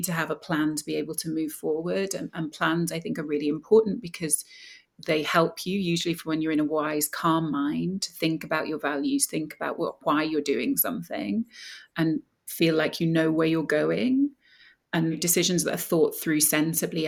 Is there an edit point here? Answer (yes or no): no